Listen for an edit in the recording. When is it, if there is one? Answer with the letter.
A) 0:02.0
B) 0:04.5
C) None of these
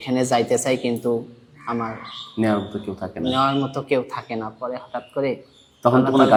C